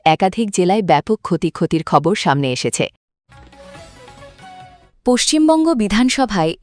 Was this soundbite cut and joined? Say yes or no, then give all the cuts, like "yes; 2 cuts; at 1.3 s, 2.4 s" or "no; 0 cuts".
yes; 2 cuts; at 3.0 s, 4.8 s